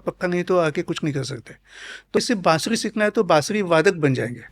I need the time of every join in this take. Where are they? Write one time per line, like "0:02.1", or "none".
0:02.2